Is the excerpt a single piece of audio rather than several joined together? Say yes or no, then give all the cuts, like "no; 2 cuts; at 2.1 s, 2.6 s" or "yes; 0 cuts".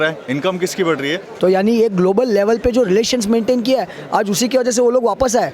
no; 1 cut; at 1.3 s